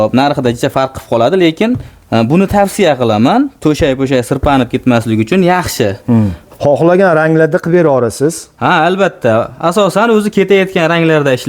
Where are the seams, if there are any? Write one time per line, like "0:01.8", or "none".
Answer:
0:06.4